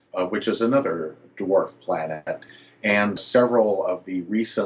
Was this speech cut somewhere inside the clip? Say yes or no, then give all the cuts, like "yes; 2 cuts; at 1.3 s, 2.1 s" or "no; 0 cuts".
yes; 1 cut; at 2.3 s